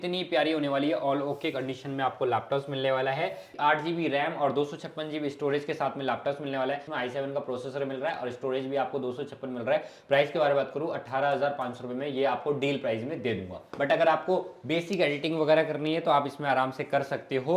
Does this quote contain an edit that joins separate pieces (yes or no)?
yes